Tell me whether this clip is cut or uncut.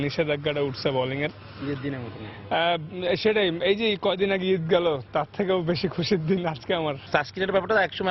uncut